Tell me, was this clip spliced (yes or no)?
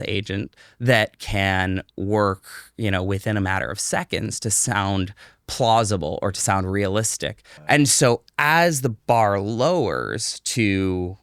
yes